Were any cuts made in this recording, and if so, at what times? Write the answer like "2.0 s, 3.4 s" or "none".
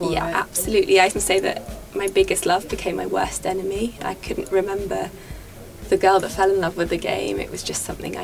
1.1 s